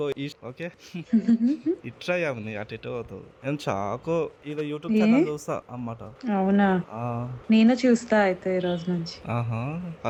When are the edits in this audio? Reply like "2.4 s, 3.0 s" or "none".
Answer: none